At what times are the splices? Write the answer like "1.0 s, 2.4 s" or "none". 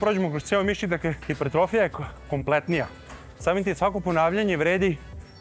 1.3 s